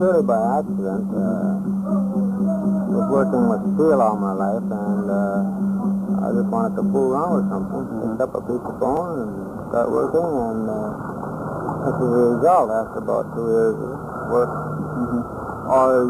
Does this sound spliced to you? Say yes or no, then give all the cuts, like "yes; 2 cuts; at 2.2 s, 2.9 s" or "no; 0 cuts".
yes; 1 cut; at 9.2 s